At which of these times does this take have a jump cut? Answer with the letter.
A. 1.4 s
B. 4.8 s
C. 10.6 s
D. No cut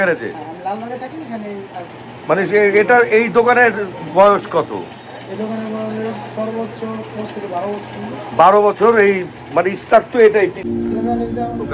C